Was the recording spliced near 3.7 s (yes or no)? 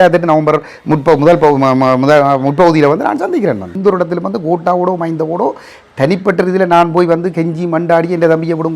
yes